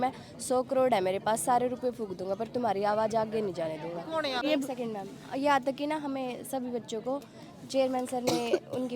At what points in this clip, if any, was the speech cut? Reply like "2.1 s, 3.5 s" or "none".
4.4 s